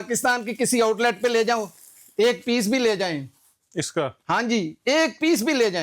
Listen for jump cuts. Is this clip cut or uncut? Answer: uncut